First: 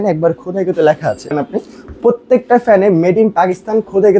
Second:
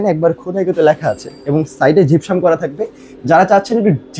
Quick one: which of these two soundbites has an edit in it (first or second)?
first